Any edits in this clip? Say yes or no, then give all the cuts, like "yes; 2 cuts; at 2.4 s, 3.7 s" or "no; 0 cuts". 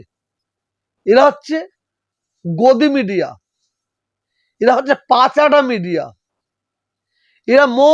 no; 0 cuts